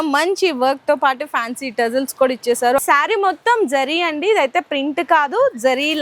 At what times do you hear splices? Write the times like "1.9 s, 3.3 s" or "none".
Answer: 2.8 s

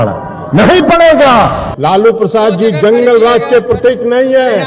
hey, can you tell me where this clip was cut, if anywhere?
1.6 s

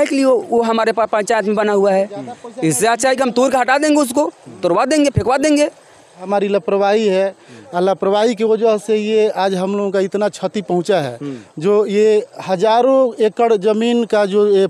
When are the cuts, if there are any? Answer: 6.2 s

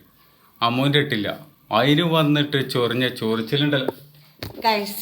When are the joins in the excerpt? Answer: none

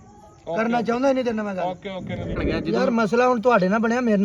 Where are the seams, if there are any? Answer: 2.4 s

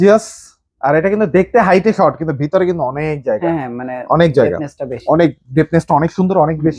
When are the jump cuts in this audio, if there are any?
none

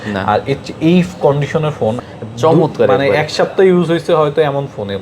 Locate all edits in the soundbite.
2.0 s

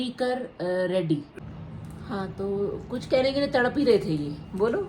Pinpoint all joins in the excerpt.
1.3 s

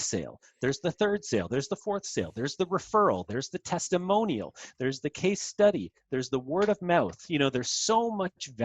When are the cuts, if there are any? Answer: none

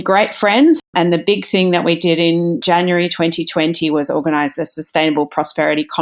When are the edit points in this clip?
0.8 s, 2.6 s

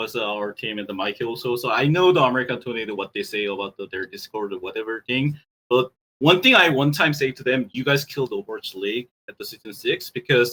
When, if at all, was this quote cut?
none

